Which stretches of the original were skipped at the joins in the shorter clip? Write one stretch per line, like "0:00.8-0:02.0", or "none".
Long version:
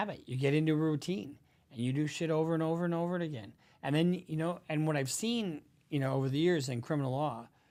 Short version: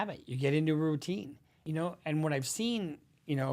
0:01.6-0:04.3

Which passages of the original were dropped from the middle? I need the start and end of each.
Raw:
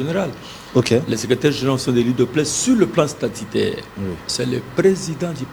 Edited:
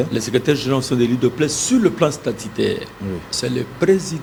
none

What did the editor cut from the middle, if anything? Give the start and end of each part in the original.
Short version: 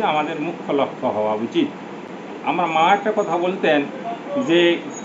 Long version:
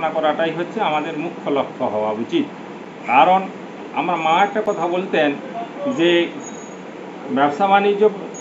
0:02.9-0:03.6

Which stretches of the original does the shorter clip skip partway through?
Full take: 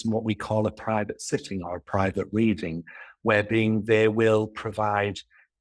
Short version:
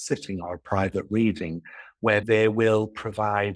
0:03.5-0:03.8

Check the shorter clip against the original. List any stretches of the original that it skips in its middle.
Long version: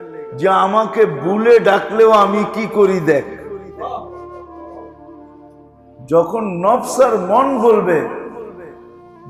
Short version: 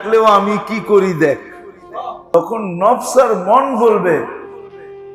0:04.2-0:06.2

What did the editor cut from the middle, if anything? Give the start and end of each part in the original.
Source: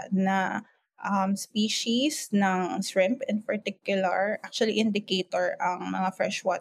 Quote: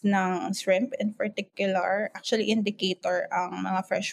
none

